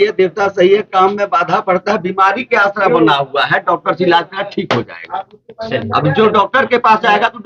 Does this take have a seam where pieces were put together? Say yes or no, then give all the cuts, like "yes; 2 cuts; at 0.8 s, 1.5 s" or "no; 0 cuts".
no; 0 cuts